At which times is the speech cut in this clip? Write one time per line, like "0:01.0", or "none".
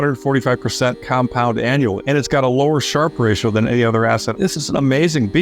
0:02.0
0:04.3